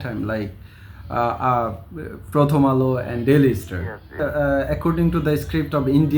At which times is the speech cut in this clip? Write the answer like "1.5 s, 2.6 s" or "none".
4.2 s